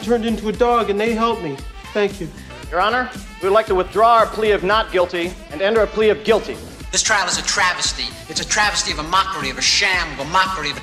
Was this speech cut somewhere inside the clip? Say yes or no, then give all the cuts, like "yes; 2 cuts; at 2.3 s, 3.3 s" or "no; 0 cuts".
no; 0 cuts